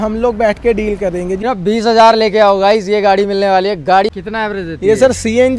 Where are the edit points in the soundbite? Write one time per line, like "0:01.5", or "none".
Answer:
0:01.4
0:04.1